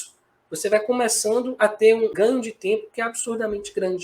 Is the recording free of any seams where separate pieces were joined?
no; 1 cut; at 2.1 s

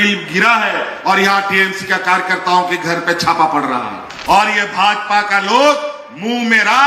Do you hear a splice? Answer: yes; 1 cut; at 4.1 s

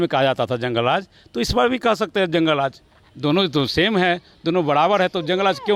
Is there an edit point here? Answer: no; 0 cuts

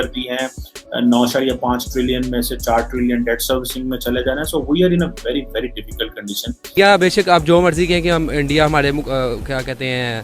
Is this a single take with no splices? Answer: no; 1 cut; at 6.7 s

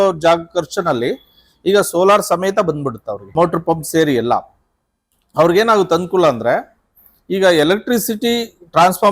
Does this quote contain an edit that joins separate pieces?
no; 0 cuts

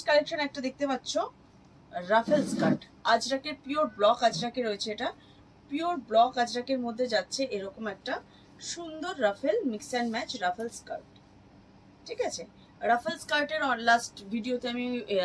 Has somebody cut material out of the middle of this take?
no; 0 cuts

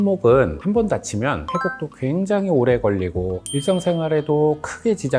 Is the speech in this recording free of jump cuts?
yes; 0 cuts

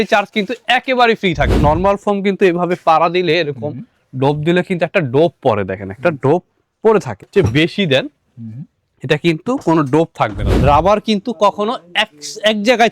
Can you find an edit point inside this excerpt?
yes; 3 cuts; at 1.5 s, 7.3 s, 10.5 s

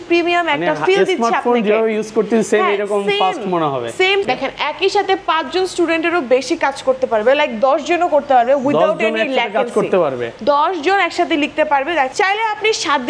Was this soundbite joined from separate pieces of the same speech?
yes; 2 cuts; at 4.2 s, 12.1 s

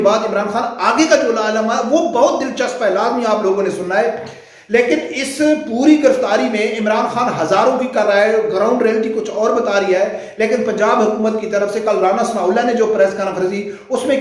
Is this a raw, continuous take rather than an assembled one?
yes; 0 cuts

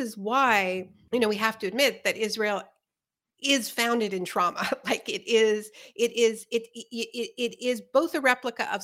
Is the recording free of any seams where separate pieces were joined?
no; 1 cut; at 0.9 s

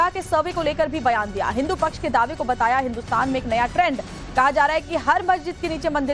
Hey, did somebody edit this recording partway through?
no; 0 cuts

